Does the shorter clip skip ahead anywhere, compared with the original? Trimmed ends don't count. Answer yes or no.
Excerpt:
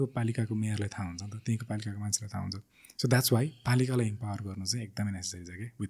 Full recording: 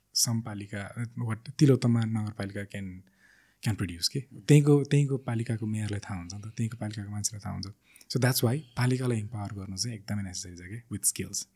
no